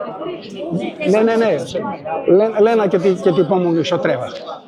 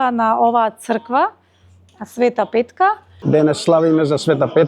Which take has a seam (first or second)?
second